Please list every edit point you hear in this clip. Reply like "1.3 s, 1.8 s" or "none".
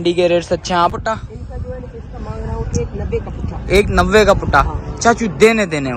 0.9 s